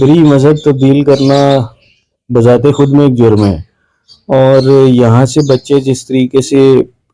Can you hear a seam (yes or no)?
no